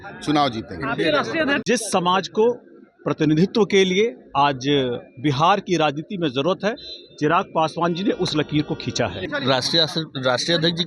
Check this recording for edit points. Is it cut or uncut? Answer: cut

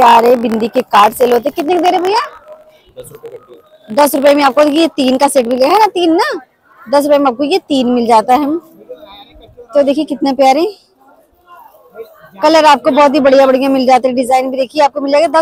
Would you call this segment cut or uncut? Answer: uncut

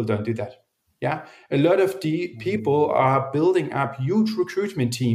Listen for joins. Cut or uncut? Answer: uncut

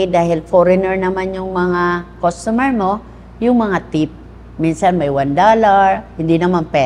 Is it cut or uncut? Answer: uncut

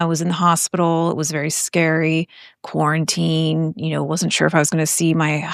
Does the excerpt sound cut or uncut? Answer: uncut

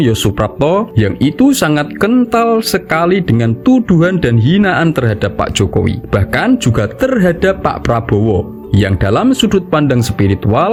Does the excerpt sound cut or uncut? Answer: uncut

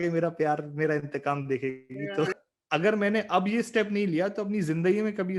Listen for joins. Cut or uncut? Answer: cut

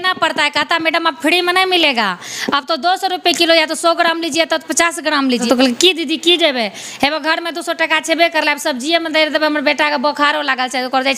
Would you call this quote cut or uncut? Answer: cut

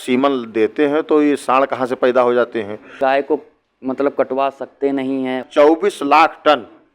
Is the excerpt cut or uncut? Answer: cut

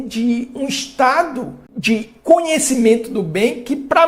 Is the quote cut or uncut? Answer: cut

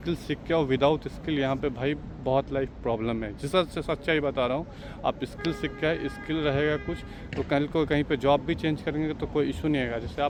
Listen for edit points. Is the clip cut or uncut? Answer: uncut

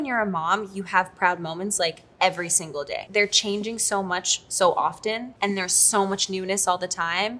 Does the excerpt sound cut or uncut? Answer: uncut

